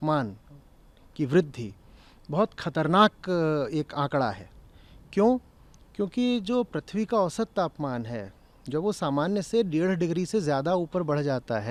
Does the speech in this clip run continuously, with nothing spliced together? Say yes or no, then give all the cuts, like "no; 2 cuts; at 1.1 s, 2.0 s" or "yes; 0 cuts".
yes; 0 cuts